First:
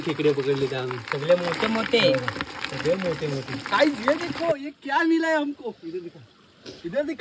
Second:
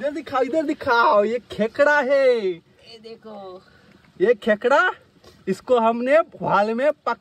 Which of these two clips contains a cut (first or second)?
first